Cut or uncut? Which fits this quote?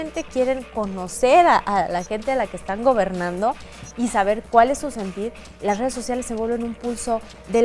uncut